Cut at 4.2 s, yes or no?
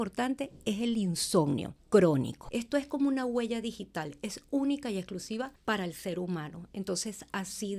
no